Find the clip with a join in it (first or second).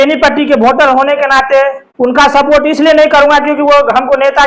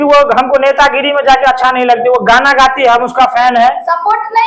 first